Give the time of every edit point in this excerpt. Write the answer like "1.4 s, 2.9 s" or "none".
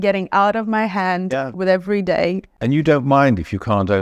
2.5 s